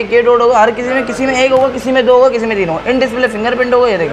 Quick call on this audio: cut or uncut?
uncut